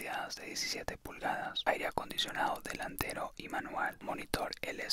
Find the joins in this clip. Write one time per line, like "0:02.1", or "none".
0:01.6
0:04.0